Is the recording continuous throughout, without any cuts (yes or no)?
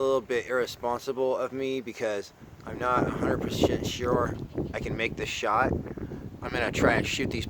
no